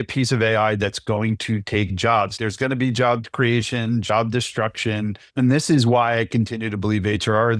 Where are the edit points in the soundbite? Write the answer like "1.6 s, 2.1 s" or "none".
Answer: 2.3 s, 3.3 s, 5.2 s